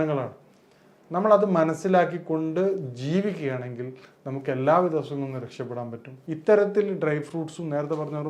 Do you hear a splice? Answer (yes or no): yes